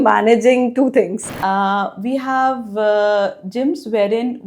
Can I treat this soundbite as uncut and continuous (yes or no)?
no